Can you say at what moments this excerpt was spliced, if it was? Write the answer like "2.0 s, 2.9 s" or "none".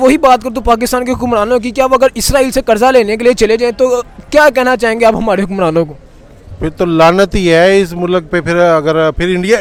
none